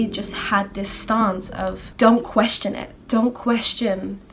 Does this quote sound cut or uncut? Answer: cut